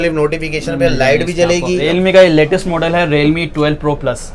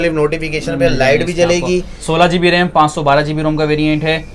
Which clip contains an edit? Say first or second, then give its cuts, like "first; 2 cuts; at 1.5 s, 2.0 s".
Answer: first; 1 cut; at 1.8 s